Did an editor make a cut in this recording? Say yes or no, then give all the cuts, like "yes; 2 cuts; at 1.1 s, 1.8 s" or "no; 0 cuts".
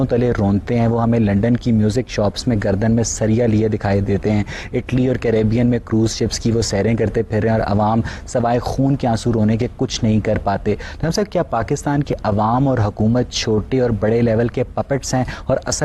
no; 0 cuts